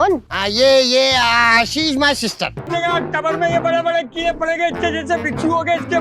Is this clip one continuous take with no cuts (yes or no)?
no